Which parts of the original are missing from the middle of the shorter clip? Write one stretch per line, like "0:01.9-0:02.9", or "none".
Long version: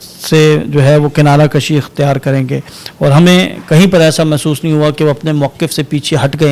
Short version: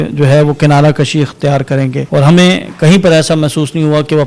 0:02.6-0:02.9